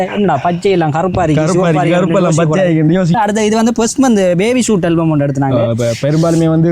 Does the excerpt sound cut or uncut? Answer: uncut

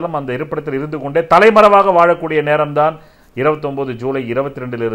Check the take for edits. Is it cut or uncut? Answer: uncut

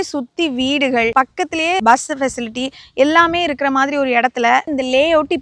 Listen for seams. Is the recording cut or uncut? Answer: uncut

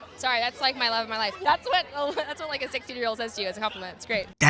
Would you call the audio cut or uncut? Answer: cut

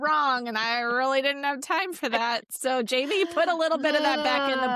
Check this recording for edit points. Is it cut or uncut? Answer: uncut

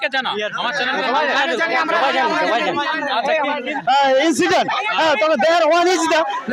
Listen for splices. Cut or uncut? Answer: cut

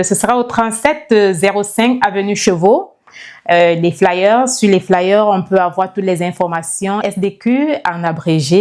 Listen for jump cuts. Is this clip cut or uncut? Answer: cut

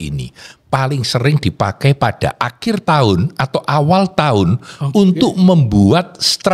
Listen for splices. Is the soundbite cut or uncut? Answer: uncut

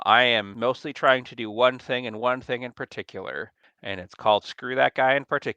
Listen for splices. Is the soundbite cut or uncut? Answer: cut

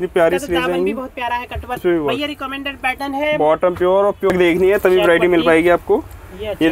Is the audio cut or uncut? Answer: cut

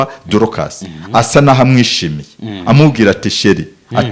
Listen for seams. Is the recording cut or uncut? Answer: uncut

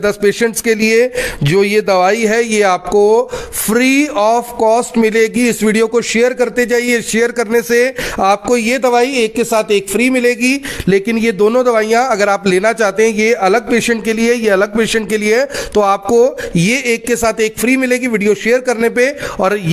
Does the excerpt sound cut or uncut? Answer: uncut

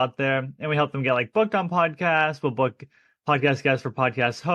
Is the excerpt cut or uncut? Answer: uncut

